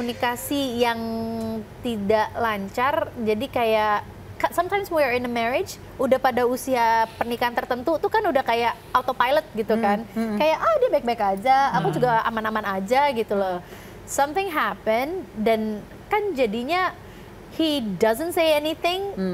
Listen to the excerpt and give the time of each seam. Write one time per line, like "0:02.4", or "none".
none